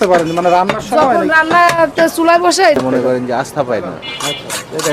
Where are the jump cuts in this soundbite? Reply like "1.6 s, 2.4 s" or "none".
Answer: 2.8 s

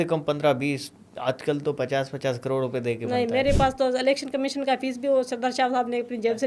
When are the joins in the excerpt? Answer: none

